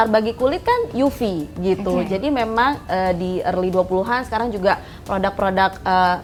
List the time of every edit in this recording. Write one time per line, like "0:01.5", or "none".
none